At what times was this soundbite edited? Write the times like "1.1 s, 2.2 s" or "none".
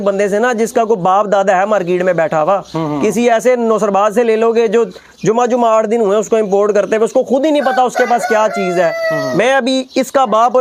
none